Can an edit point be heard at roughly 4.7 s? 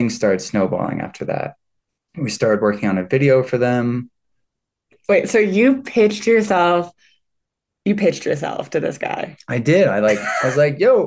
yes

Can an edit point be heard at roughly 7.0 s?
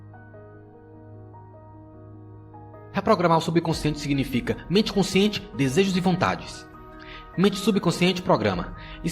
no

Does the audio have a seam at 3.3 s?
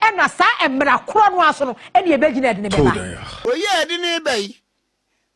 yes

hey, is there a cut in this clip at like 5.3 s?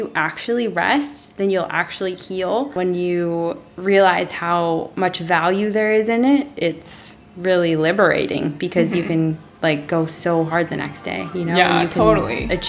no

